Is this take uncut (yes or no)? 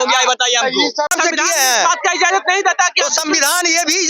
no